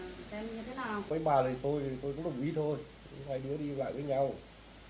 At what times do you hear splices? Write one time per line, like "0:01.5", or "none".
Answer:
0:01.1